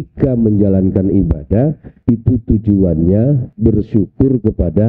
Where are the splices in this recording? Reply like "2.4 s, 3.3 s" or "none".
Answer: 1.9 s, 3.5 s